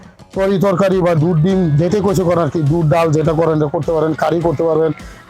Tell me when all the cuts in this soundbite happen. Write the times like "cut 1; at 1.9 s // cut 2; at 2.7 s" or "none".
none